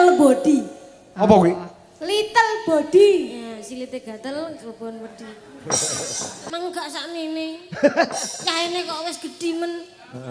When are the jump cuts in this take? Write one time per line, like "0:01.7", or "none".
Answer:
0:06.4